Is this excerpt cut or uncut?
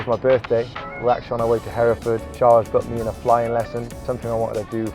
cut